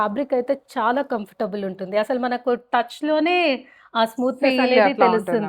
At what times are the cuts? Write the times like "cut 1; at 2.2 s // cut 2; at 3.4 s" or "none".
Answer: none